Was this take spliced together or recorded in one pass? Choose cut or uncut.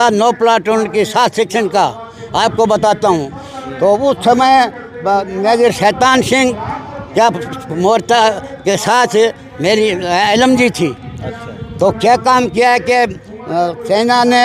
uncut